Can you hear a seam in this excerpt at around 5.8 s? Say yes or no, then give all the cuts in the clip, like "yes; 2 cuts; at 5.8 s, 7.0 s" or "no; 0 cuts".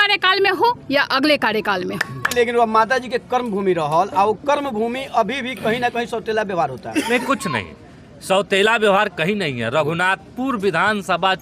no; 1 cut; at 2.3 s